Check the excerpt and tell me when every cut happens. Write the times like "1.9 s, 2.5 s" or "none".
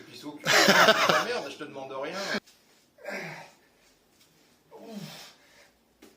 2.4 s